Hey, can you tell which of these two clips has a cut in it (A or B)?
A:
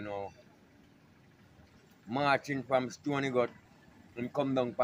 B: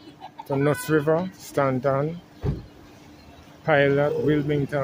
B